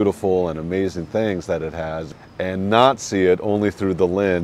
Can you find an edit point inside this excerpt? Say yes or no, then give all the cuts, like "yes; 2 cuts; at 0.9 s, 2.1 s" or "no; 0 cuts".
yes; 1 cut; at 2.1 s